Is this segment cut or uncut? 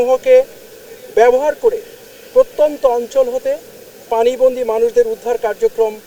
uncut